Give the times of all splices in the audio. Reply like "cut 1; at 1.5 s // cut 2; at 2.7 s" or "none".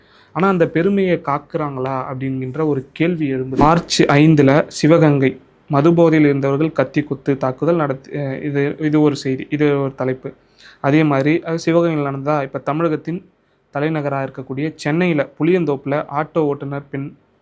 cut 1; at 3.6 s

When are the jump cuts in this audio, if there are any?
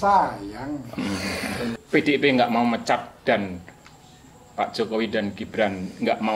cut 1; at 1.7 s

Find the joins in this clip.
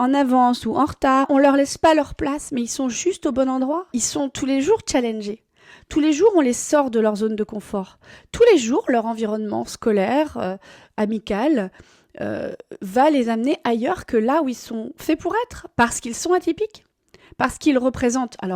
cut 1; at 1.3 s // cut 2; at 4.0 s

